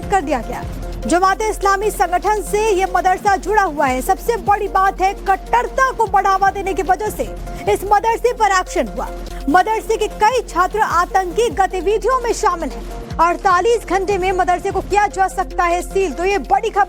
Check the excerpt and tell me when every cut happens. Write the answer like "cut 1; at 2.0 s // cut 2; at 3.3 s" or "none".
none